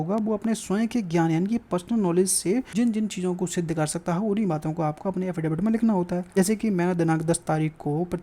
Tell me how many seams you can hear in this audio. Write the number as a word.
two